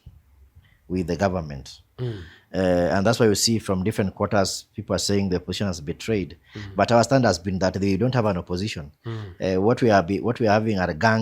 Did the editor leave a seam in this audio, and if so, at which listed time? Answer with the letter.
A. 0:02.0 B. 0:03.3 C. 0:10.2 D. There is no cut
D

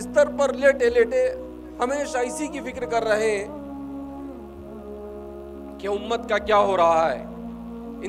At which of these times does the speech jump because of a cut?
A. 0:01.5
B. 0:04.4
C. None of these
C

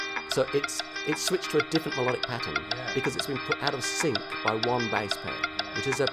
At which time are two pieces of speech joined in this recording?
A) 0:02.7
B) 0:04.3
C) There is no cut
C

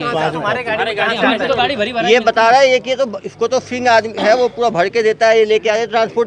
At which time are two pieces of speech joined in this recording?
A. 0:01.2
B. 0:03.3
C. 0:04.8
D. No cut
D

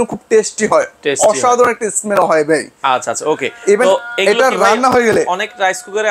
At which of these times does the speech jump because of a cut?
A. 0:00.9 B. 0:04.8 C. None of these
C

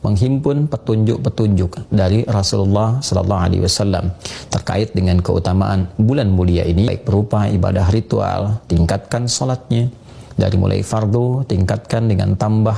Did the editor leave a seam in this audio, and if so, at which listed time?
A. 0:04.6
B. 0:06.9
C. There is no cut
B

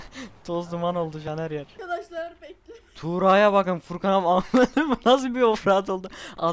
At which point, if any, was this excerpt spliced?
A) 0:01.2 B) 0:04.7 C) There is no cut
A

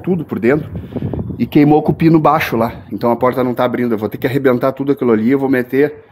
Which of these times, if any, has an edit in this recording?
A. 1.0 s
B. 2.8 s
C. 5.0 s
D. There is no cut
D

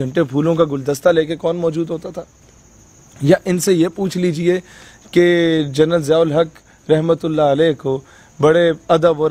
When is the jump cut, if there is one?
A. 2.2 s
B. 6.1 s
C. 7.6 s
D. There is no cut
D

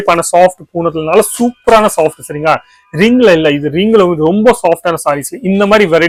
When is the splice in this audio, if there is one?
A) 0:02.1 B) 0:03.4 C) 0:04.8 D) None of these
D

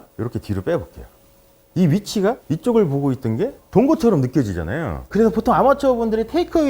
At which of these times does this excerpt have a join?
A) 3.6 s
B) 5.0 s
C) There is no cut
B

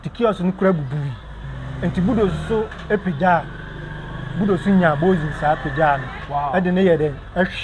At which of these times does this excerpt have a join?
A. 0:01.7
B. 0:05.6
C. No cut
C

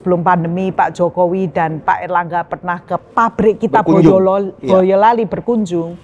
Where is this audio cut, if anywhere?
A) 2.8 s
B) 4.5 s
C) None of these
C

